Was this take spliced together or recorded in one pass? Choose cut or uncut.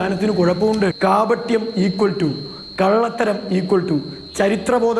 cut